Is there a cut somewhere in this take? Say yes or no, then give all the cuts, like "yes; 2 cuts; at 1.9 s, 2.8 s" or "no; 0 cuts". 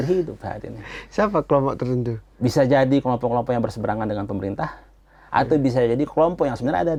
no; 0 cuts